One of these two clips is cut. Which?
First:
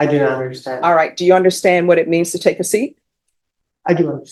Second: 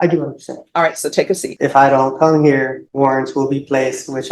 second; 2 cuts; at 1.5 s, 2.8 s

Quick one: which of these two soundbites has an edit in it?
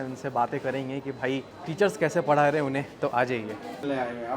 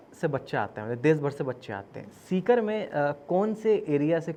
first; 1 cut; at 1.6 s

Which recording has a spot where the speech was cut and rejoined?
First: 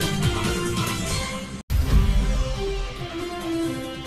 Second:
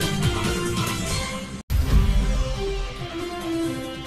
second; 1 cut; at 2.9 s

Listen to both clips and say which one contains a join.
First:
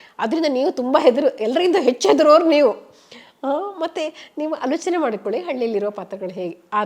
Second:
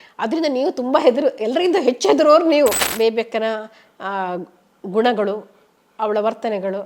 second; 1 cut; at 2.9 s

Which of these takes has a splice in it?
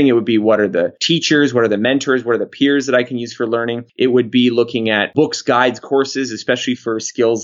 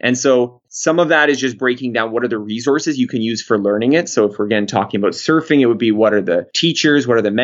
first; 2 cuts; at 3.8 s, 5.1 s

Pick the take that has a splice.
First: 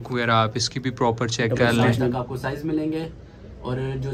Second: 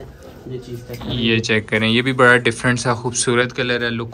first; 1 cut; at 2.1 s

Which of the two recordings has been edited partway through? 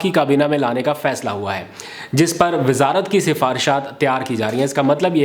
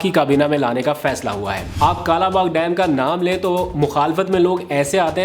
second; 1 cut; at 1.7 s

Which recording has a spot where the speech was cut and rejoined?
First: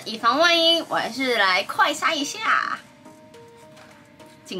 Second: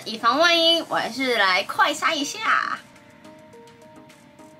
second; 1 cut; at 2.9 s

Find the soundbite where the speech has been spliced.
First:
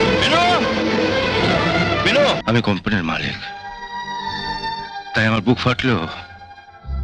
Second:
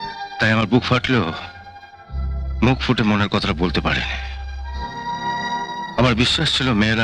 first; 1 cut; at 2.4 s

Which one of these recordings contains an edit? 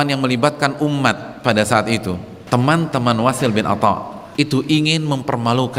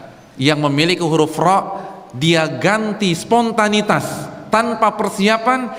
first; 2 cuts; at 2.3 s, 4.2 s

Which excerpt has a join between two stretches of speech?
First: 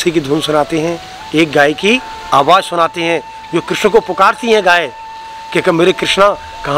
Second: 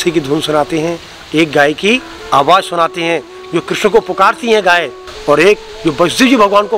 second; 1 cut; at 5.1 s

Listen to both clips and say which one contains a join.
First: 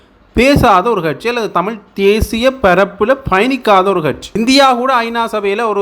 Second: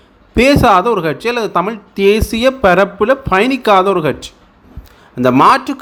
first; 1 cut; at 4.3 s

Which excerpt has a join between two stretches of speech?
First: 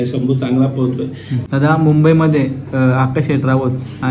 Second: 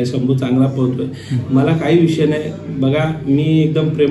first; 1 cut; at 1.4 s

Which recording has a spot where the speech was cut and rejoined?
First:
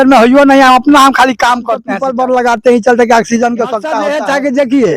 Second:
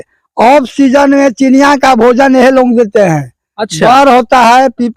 first; 2 cuts; at 2.0 s, 4.0 s

